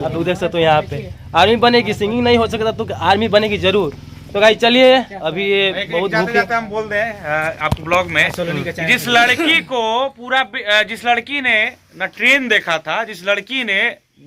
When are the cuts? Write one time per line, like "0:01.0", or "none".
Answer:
none